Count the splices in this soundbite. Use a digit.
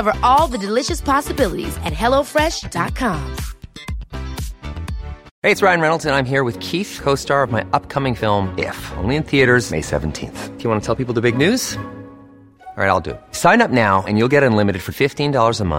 1